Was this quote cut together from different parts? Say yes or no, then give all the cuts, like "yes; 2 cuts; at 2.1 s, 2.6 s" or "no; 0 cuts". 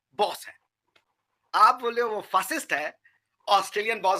no; 0 cuts